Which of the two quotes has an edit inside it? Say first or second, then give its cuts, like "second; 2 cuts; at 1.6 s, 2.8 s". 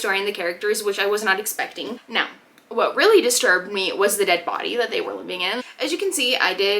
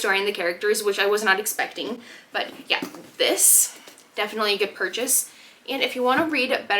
first; 2 cuts; at 2.0 s, 5.6 s